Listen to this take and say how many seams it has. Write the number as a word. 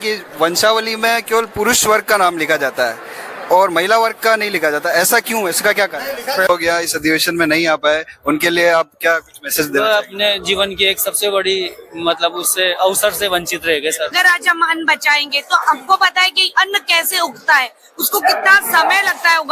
two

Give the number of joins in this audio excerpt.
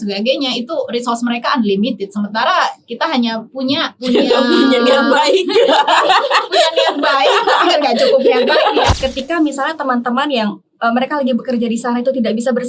two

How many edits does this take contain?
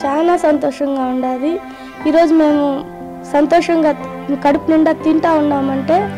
one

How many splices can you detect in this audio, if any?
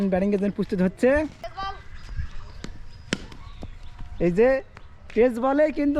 one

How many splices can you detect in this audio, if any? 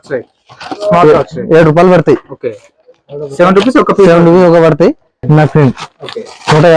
one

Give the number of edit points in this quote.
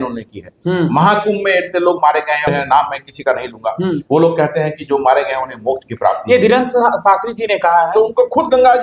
one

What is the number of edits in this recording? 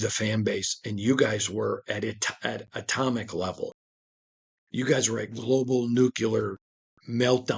zero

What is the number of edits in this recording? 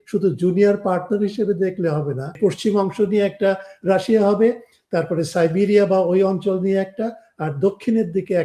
one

